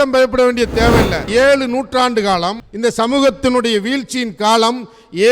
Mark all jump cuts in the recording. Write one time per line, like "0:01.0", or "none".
0:01.2

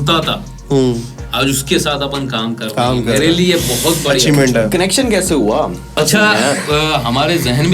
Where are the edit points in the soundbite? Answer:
0:06.0

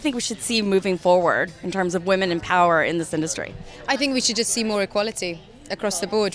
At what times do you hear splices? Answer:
none

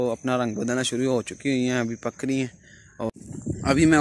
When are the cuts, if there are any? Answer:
0:03.1

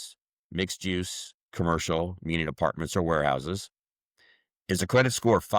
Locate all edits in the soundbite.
none

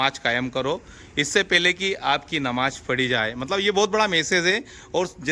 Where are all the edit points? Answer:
none

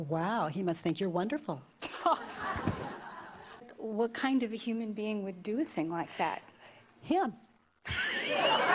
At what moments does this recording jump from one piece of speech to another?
0:03.6

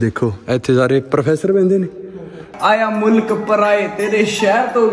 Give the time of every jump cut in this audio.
0:02.5

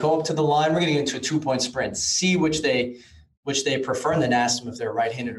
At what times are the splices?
none

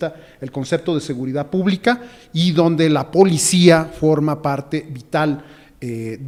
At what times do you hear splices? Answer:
none

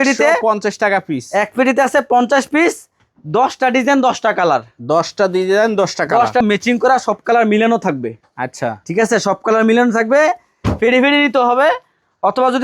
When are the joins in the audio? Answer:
0:06.4

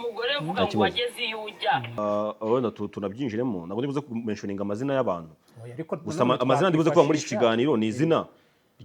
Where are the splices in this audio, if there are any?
0:02.0

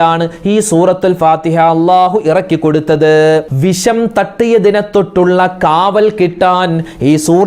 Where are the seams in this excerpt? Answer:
0:03.5

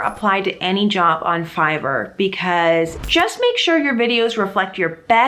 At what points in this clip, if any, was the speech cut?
0:02.9

